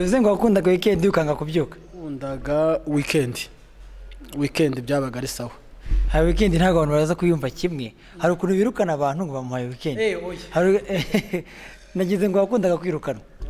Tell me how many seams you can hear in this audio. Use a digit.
1